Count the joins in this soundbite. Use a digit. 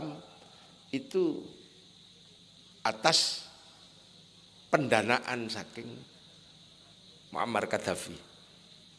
0